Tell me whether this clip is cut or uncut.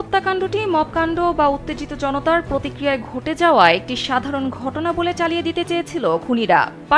uncut